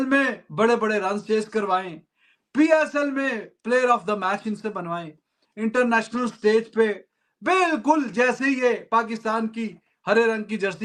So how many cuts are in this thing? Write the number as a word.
zero